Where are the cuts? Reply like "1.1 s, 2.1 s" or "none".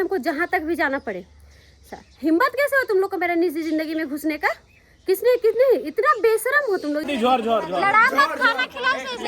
7.1 s

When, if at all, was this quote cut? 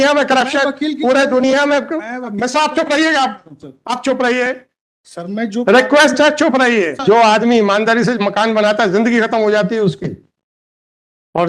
7.0 s

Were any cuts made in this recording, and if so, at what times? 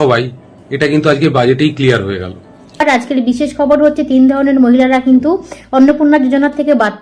2.8 s

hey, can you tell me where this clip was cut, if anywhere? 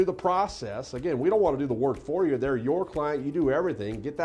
none

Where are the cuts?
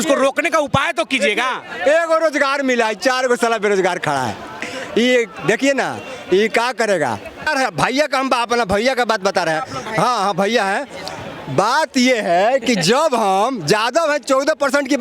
7.5 s

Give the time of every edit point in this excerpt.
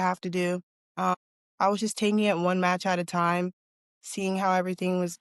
1.2 s

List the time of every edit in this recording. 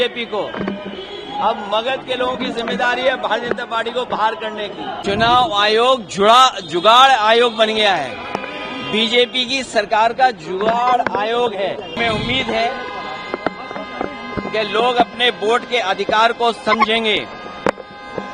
5.0 s, 12.0 s

